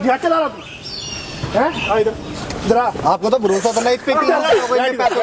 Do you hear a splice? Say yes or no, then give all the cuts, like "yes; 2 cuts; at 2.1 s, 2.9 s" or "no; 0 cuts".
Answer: no; 0 cuts